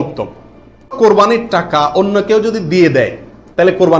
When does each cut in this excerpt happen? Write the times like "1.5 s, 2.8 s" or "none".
1.0 s